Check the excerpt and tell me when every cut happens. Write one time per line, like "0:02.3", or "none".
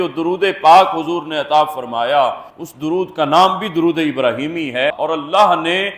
0:04.9